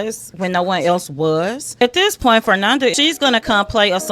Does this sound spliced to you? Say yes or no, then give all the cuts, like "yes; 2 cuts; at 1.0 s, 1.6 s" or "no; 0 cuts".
yes; 2 cuts; at 1.7 s, 2.9 s